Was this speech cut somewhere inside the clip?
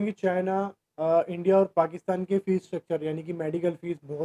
no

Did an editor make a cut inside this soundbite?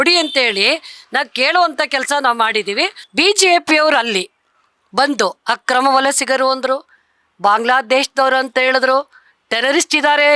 yes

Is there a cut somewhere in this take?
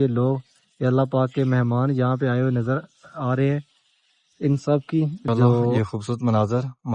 yes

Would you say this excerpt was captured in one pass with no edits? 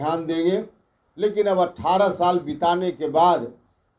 yes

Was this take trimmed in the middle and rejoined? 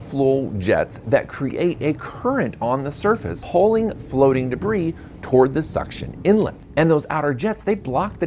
yes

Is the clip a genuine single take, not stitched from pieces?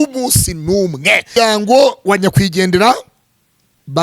no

